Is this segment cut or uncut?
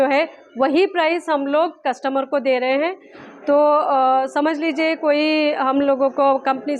uncut